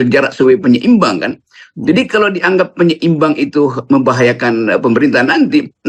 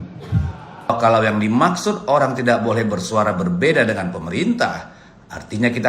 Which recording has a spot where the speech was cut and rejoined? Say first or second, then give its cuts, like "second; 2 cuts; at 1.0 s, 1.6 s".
second; 1 cut; at 1.0 s